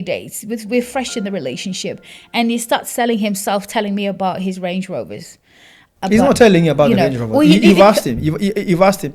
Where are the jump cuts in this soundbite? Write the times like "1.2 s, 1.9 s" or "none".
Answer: none